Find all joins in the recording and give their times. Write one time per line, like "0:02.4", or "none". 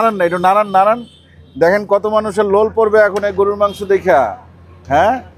none